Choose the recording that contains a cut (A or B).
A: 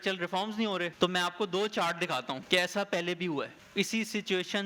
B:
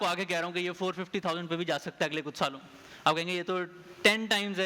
A